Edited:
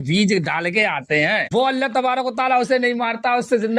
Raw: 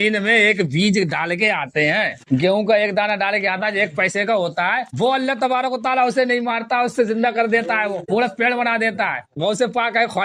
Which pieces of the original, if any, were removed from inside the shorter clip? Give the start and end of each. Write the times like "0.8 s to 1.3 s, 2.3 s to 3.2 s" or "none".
2.1 s to 4.9 s

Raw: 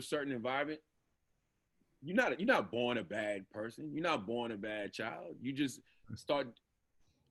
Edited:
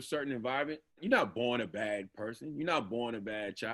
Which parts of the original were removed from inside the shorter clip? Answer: 1.0 s to 2.4 s

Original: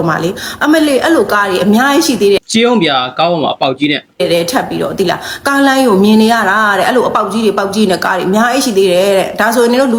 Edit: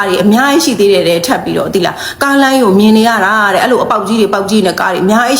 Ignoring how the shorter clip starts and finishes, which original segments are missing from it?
2.4 s to 4.2 s

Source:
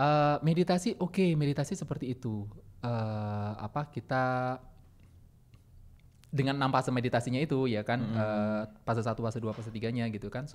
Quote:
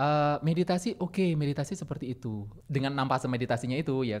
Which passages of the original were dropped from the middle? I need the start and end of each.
2.5 s to 6.2 s

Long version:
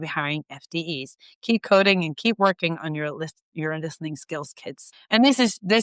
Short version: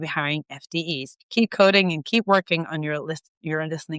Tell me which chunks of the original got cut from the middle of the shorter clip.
1.2 s to 1.3 s

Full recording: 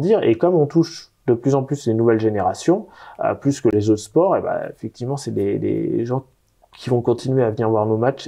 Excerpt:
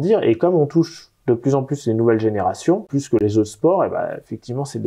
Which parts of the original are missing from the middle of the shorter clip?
2.9 s to 3.5 s

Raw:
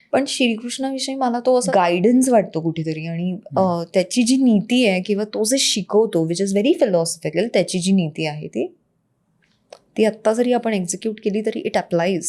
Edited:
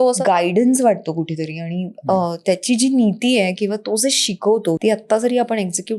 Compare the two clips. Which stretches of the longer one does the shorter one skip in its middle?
6.3 s to 9.9 s

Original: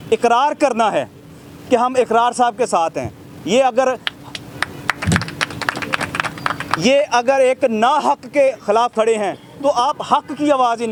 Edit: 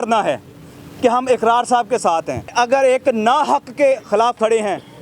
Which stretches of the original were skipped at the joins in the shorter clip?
3.2 s to 7.1 s

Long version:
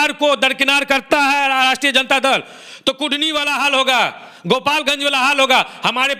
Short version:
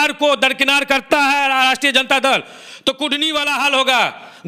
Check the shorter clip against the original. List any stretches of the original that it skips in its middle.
none

